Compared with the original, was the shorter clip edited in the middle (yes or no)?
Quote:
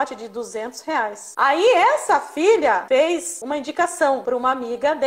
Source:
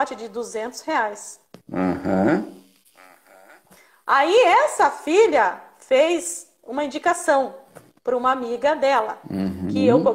yes